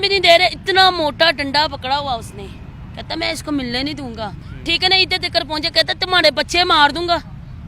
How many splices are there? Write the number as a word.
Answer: one